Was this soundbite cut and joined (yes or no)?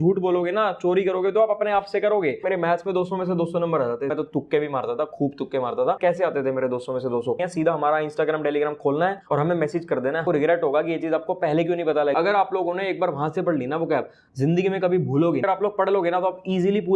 yes